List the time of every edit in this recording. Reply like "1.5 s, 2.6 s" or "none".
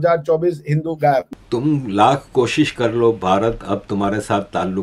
1.3 s